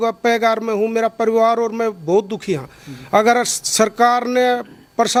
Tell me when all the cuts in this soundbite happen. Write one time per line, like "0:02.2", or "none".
none